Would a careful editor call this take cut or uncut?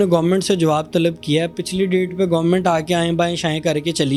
uncut